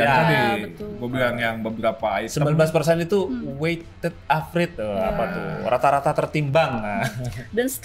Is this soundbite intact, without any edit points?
yes; 0 cuts

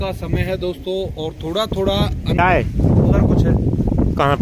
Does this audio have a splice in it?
yes; 1 cut; at 2.4 s

